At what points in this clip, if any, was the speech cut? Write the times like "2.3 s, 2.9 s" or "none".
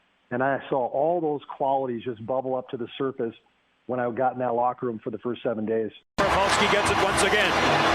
6.2 s